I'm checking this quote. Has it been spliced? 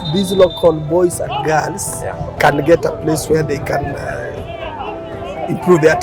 no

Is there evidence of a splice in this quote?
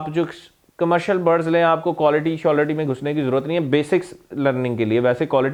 no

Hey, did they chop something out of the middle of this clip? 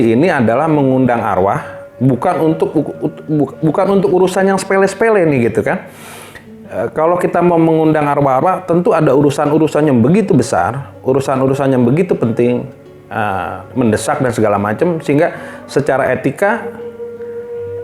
no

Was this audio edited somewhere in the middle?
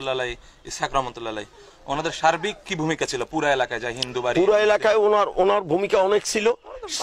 no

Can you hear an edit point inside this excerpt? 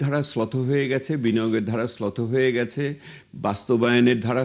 no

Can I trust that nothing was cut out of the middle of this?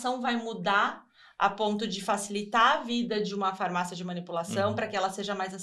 yes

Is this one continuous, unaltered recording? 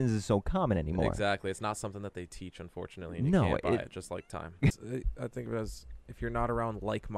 no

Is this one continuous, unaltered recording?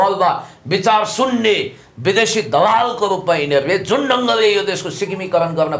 yes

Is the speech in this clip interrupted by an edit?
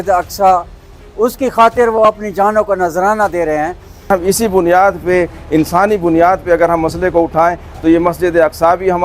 yes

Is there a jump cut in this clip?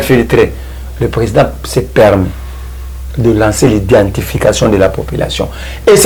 no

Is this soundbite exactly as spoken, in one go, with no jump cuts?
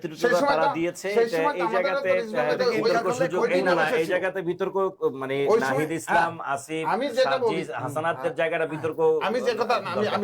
yes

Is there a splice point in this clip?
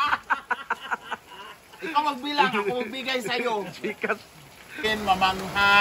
yes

